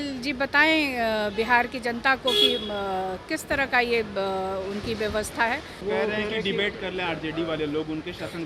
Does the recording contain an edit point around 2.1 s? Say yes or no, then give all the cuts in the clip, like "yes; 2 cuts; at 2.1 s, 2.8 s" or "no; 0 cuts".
no; 1 cut; at 5.8 s